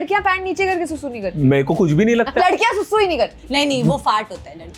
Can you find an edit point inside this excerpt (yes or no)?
yes